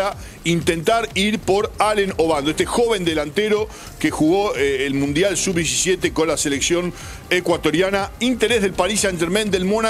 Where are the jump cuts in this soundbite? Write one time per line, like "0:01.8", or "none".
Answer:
none